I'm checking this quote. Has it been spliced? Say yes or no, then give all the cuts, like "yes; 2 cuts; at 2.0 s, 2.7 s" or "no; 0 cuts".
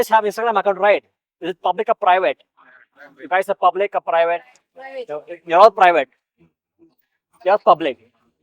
no; 0 cuts